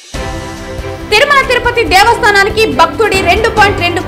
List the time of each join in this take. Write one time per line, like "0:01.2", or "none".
0:00.9